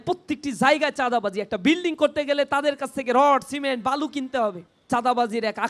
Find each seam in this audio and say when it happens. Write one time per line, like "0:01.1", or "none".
0:04.7